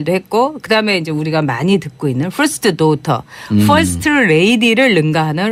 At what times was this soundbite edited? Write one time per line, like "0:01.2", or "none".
none